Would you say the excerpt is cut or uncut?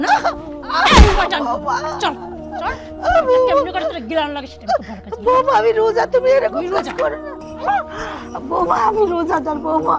cut